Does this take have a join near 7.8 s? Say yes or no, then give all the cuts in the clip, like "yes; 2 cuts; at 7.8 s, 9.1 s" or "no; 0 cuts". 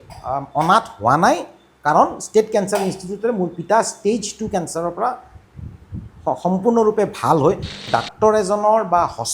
yes; 1 cut; at 7.8 s